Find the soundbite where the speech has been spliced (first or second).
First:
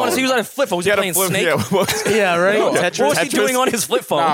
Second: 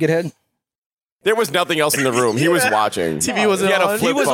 second